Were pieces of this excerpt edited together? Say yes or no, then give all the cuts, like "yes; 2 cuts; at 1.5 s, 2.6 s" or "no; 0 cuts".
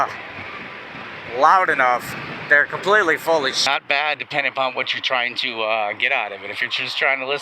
yes; 1 cut; at 3.6 s